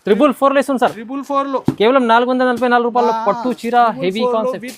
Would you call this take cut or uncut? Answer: uncut